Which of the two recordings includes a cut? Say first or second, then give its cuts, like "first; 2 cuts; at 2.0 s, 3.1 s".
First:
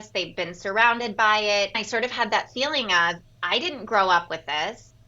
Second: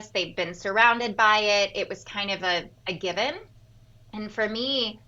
first; 1 cut; at 1.7 s